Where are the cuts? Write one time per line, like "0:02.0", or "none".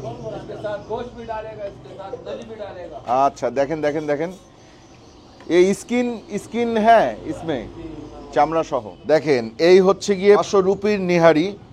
0:08.9